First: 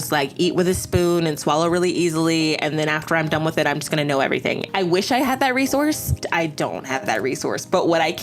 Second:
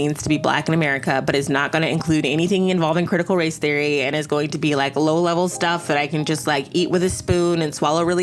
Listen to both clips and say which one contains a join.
first; 2 cuts; at 4.6 s, 6.1 s

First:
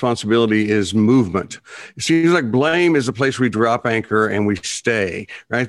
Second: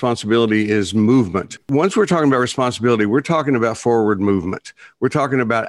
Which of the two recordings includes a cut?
second; 1 cut; at 1.6 s

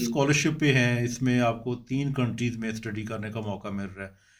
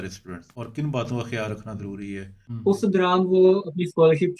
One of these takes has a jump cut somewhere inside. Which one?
second; 1 cut; at 2.3 s

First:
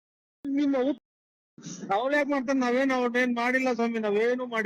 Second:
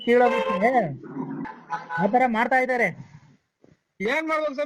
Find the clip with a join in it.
second; 1 cut; at 1.4 s

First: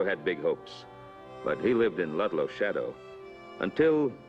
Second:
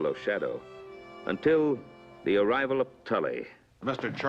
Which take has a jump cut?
first; 1 cut; at 1.0 s

